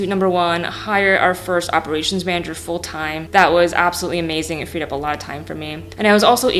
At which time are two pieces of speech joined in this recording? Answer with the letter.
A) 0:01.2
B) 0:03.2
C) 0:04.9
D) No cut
B